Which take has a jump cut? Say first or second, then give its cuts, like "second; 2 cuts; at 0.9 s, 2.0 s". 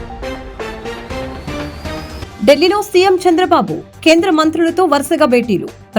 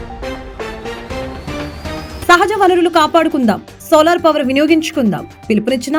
first; 1 cut; at 2.2 s